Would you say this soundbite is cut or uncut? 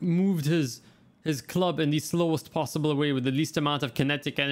uncut